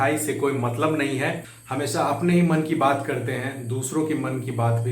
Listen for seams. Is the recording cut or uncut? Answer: cut